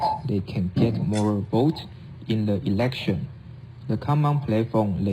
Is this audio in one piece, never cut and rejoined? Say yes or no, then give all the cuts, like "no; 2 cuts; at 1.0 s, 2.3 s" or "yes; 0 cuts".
no; 1 cut; at 2.1 s